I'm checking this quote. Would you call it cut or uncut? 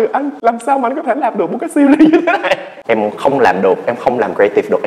cut